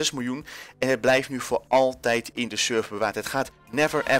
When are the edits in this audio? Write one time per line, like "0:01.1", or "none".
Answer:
none